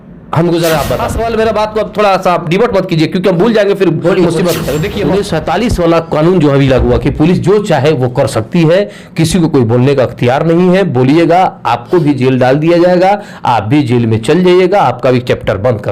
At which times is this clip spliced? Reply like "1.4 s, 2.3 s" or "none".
1.1 s, 4.9 s